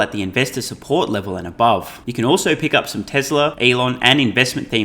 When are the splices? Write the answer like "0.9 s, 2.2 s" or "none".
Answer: 2.0 s, 3.6 s